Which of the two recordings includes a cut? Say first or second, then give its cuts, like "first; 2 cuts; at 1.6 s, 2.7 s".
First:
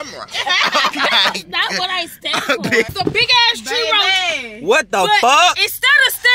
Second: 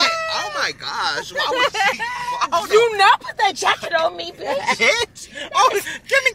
first; 1 cut; at 2.9 s